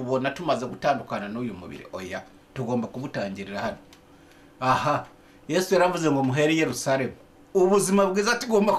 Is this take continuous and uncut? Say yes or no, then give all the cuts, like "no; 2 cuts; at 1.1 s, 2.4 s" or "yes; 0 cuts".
yes; 0 cuts